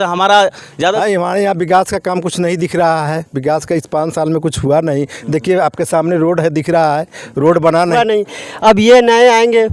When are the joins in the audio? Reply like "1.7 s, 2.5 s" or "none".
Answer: 1.0 s, 7.9 s